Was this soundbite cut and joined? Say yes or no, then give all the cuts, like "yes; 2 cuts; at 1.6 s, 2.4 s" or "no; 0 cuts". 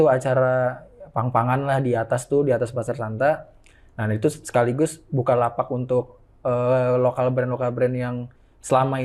no; 0 cuts